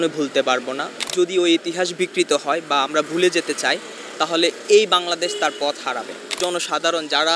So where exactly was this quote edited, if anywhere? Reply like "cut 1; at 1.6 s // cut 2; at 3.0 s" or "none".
cut 1; at 1.0 s // cut 2; at 6.4 s